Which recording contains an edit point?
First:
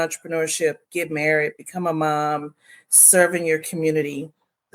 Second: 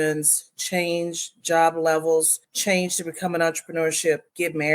second; 1 cut; at 2.4 s

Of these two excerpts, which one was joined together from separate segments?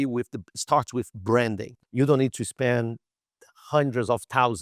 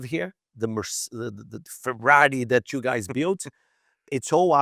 first; 1 cut; at 1.7 s

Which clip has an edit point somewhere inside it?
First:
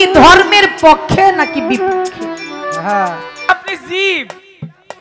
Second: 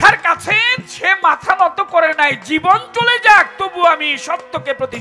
first; 1 cut; at 3.5 s

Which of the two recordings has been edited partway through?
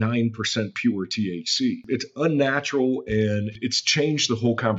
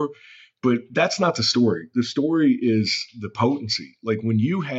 first; 2 cuts; at 1.9 s, 3.5 s

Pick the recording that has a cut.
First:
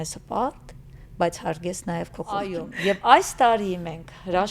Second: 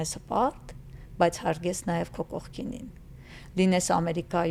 first; 1 cut; at 2.5 s

